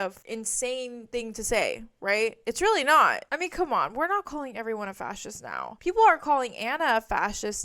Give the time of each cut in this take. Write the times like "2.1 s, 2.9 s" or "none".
3.3 s